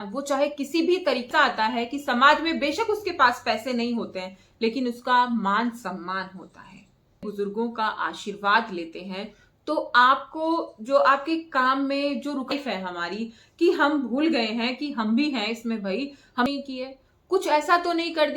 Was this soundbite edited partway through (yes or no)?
yes